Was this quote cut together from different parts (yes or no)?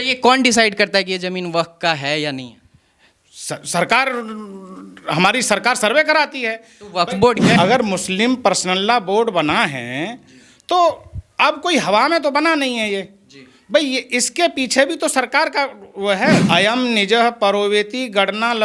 yes